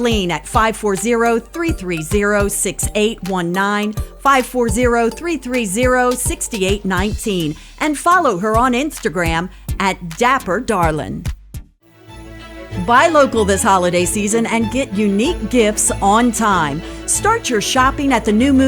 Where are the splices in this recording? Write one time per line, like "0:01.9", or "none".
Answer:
0:11.5